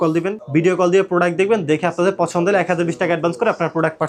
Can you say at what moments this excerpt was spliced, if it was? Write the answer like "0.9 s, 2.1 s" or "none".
none